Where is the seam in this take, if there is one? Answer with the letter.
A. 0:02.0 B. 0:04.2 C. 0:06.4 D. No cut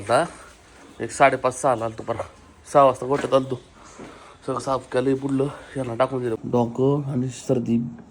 C